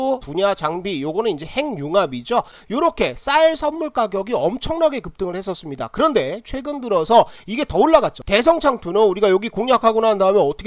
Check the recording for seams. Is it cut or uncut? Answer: cut